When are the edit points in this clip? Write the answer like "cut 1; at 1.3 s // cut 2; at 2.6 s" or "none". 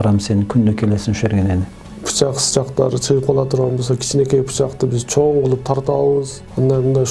cut 1; at 1.9 s